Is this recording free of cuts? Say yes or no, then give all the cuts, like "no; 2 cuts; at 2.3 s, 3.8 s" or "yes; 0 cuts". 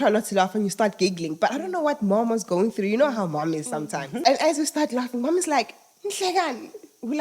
no; 1 cut; at 4.2 s